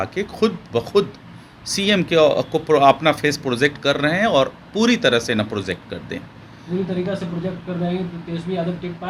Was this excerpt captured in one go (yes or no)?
yes